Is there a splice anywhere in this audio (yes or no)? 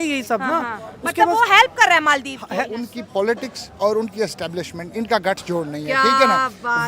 yes